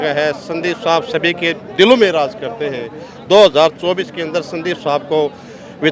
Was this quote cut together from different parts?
no; 0 cuts

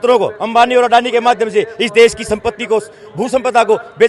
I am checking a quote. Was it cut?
no; 0 cuts

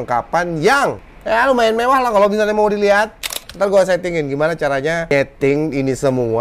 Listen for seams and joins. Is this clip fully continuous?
no; 1 cut; at 5.1 s

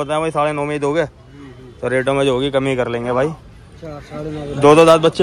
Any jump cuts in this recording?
no; 0 cuts

